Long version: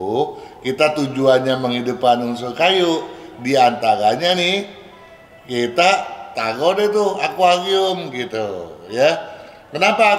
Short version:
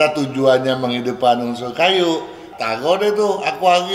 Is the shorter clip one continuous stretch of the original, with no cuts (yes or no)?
no